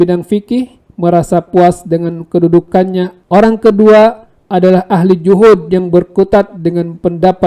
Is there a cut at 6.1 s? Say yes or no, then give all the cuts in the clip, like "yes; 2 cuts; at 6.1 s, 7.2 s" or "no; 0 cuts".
no; 1 cut; at 3.2 s